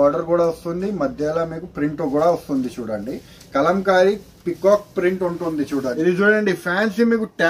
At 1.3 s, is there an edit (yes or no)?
no